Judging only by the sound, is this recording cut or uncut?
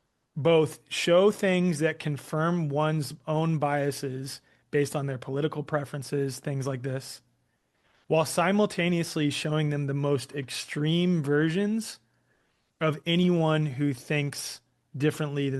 uncut